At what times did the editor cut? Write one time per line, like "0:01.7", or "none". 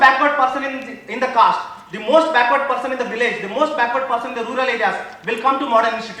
none